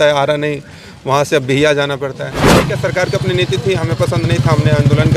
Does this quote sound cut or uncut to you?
cut